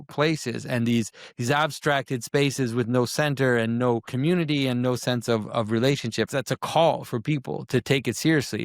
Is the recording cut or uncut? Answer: cut